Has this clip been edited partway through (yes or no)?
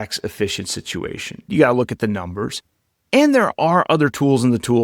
yes